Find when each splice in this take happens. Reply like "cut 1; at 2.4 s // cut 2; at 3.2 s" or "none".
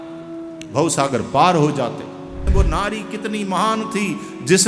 cut 1; at 2.5 s